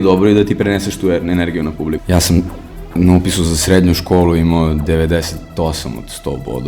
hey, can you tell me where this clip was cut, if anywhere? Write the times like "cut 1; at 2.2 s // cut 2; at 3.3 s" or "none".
cut 1; at 2.0 s

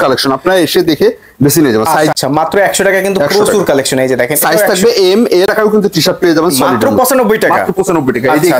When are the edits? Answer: cut 1; at 2.1 s // cut 2; at 5.5 s

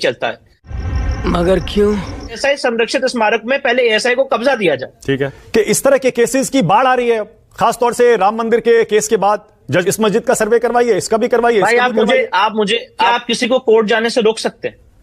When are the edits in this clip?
cut 1; at 2.4 s // cut 2; at 5.3 s // cut 3; at 9.8 s // cut 4; at 13.1 s

